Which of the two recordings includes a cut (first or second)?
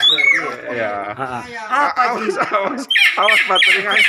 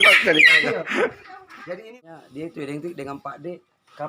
second